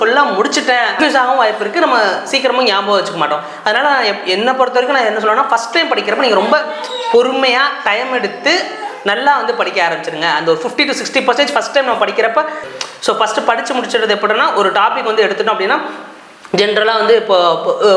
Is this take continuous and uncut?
no; 2 cuts; at 0.9 s, 12.7 s

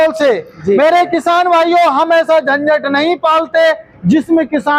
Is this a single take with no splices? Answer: yes; 0 cuts

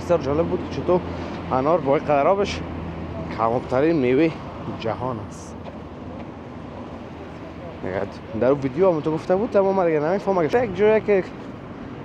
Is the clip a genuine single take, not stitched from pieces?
no; 1 cut; at 10.5 s

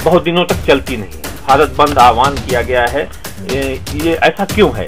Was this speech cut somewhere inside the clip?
yes; 1 cut; at 1.4 s

